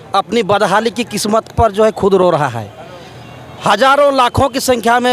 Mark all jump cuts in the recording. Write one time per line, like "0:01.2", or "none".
none